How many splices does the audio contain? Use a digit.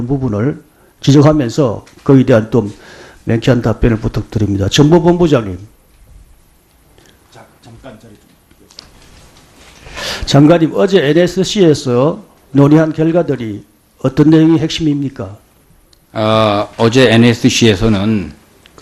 1